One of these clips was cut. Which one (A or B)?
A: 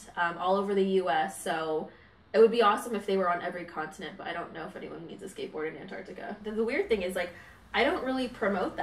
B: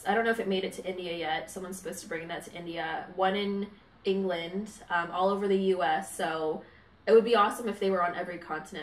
A